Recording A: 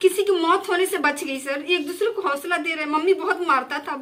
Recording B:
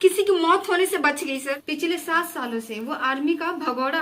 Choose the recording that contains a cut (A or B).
B